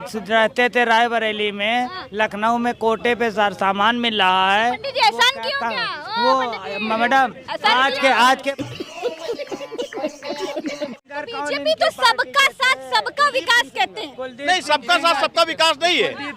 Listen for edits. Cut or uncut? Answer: cut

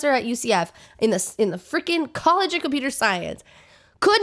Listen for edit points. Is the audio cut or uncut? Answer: uncut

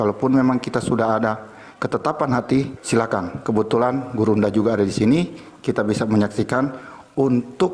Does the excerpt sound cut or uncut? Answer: cut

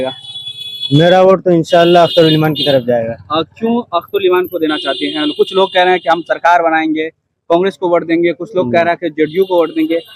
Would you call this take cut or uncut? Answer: uncut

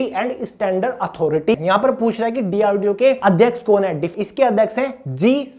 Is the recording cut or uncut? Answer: cut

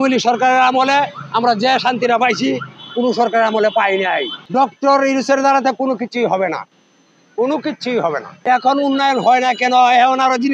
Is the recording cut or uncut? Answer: cut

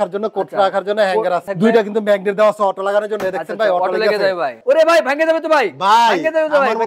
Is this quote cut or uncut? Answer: cut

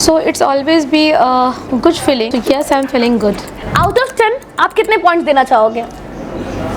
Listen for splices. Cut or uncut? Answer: cut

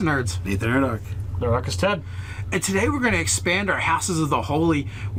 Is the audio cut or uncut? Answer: uncut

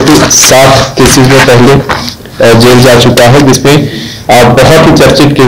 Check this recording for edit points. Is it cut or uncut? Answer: uncut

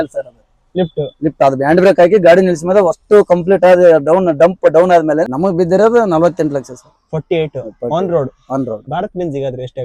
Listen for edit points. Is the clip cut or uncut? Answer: cut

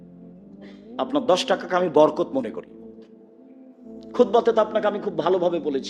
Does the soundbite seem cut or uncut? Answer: uncut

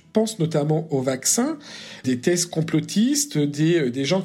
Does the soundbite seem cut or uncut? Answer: cut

